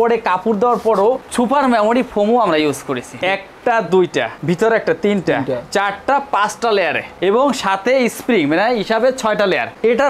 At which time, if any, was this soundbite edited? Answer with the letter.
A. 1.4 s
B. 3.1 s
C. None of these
B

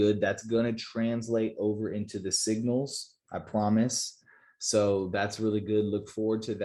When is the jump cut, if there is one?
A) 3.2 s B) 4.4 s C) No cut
C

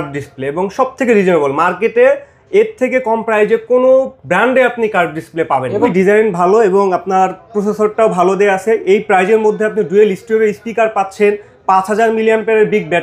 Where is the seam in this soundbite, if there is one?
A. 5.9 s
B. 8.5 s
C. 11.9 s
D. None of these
A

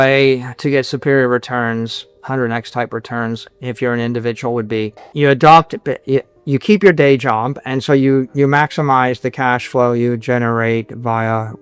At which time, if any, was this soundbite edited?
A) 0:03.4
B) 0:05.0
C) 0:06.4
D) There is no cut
B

